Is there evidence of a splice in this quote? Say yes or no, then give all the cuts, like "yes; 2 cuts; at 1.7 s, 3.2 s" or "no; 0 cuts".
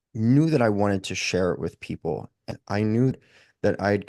yes; 2 cuts; at 2.5 s, 3.1 s